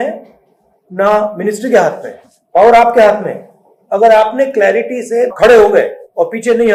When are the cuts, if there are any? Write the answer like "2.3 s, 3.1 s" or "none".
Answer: none